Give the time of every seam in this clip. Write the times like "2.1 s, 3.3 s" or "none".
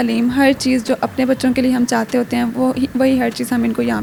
none